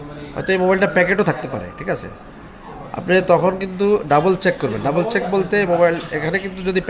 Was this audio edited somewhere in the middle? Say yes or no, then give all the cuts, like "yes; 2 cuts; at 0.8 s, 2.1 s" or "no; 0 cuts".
no; 0 cuts